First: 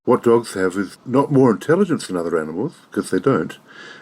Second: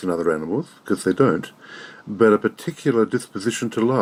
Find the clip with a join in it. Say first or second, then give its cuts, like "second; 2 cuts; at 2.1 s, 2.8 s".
first; 1 cut; at 0.9 s